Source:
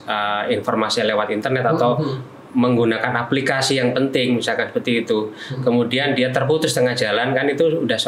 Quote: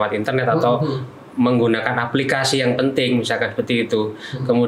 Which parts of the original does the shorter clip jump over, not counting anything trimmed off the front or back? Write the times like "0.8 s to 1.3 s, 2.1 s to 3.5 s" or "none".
none